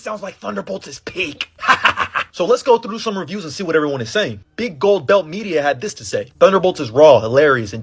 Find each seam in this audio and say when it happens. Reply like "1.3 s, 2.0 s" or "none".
none